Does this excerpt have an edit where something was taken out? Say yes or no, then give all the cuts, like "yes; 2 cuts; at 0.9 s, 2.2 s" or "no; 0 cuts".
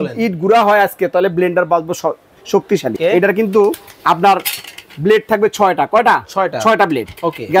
yes; 1 cut; at 2.9 s